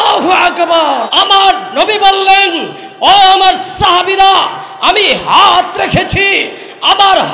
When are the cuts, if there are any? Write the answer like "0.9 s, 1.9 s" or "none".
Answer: 1.1 s